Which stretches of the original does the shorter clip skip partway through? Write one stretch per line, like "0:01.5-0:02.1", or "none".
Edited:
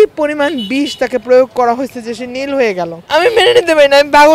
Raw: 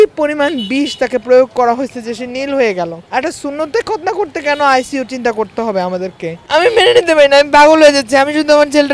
0:03.0-0:06.4